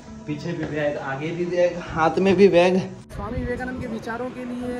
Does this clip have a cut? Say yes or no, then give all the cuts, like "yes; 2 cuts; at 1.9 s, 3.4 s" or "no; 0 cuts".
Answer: yes; 1 cut; at 3.1 s